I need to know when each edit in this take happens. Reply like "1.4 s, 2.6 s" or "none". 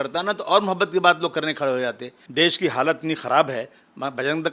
2.2 s